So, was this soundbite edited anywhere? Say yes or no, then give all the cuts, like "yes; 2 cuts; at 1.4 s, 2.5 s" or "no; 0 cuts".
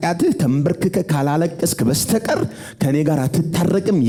no; 0 cuts